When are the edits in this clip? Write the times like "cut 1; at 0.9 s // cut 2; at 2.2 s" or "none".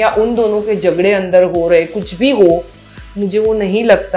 none